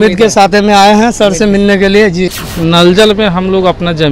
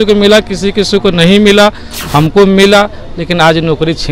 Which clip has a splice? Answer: first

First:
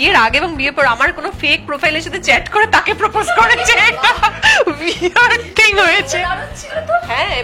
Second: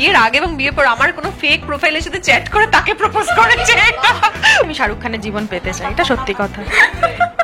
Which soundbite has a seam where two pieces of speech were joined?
second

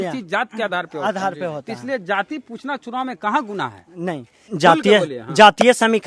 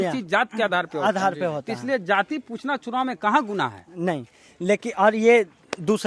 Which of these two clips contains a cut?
first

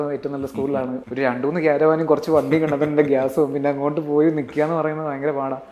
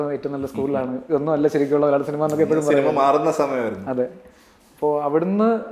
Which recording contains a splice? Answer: first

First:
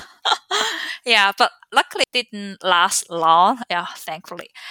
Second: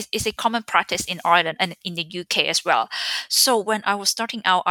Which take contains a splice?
first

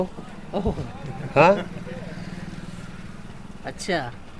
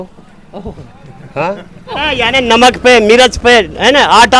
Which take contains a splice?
second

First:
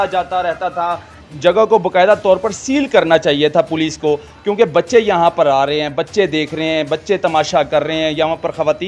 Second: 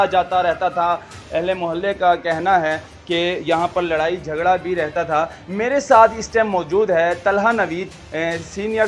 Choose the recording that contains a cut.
first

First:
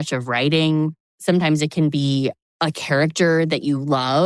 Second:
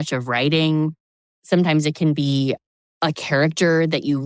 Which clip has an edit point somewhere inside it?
first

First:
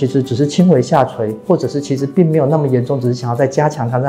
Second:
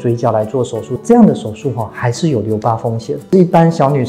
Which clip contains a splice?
second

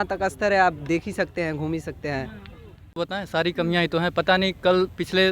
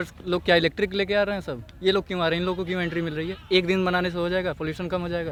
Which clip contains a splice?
first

